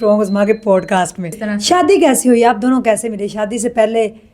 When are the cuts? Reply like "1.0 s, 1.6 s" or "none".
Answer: 1.3 s

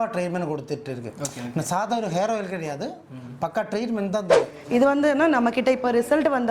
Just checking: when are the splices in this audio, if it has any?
4.6 s

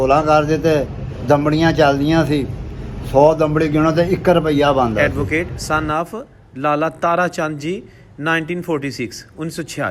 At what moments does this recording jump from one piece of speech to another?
5.0 s

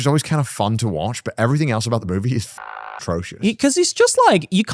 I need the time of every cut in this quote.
none

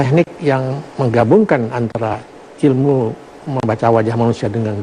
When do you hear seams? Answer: 2.2 s

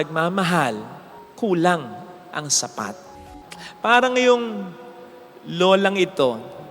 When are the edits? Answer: 3.1 s

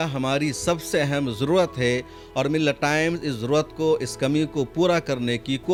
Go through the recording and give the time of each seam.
none

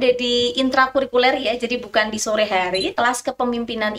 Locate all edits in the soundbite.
2.9 s

